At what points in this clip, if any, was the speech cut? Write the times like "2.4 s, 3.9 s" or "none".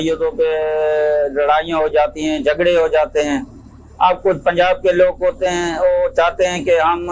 none